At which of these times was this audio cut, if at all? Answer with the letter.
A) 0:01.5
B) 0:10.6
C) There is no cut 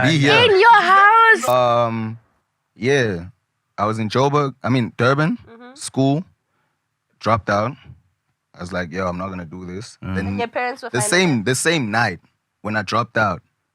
A